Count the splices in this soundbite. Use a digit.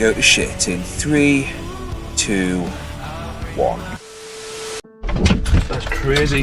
0